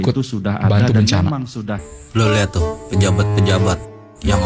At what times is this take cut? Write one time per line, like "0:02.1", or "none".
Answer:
0:01.8